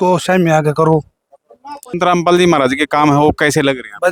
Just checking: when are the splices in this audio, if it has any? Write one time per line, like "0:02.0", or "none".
none